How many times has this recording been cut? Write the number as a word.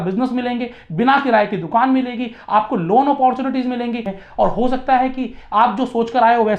one